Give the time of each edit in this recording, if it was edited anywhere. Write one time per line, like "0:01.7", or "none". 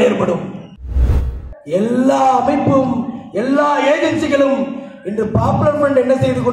0:01.2